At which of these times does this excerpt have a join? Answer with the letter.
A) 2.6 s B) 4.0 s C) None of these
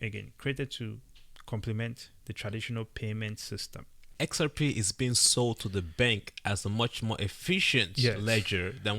B